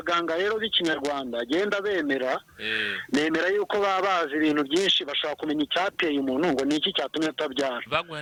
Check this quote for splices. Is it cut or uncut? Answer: uncut